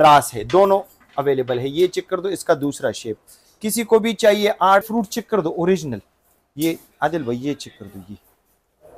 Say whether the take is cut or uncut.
cut